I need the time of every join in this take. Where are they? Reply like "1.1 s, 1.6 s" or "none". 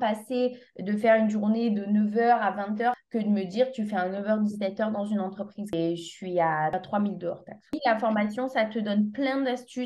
5.7 s, 7.7 s